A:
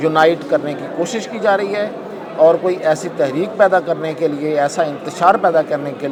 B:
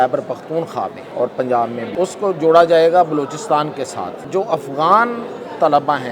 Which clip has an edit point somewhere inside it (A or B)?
B